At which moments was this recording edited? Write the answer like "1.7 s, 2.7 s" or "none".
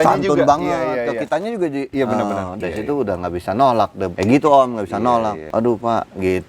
1.9 s, 2.5 s, 4.1 s, 5.4 s